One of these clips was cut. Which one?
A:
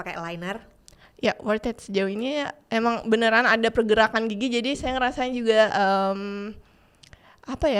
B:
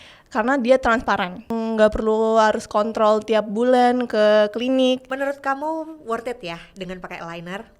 B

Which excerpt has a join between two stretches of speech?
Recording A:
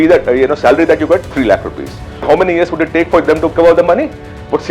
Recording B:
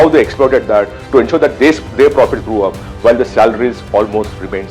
A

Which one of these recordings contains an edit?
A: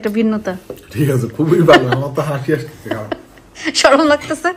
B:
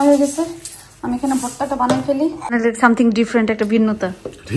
B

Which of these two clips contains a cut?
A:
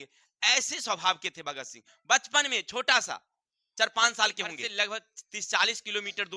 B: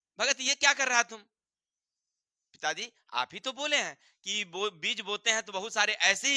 A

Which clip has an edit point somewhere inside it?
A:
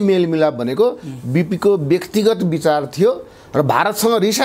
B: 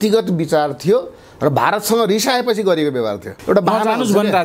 B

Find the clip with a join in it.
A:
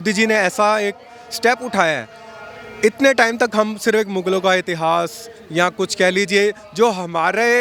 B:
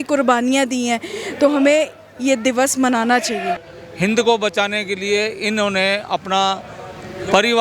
B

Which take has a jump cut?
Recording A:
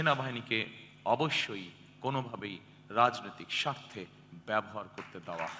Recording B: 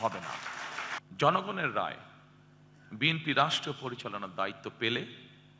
B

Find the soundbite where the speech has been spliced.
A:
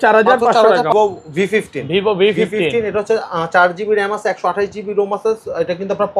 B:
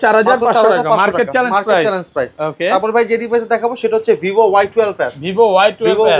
A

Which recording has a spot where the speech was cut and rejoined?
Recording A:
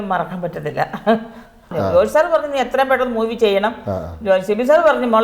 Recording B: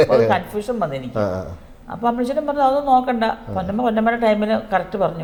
A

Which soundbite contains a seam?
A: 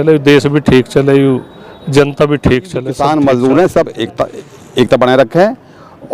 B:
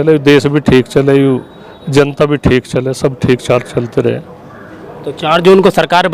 A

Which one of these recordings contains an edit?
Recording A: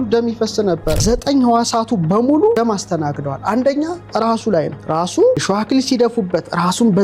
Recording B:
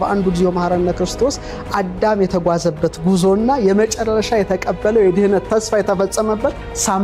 A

